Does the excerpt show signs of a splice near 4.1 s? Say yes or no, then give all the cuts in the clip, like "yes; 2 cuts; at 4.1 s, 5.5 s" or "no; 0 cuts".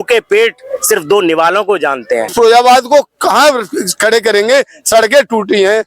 no; 1 cut; at 2.3 s